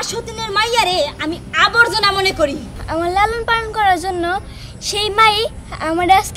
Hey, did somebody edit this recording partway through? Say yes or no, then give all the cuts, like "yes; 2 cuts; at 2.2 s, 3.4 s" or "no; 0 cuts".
yes; 1 cut; at 2.7 s